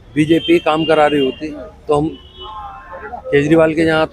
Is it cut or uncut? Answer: uncut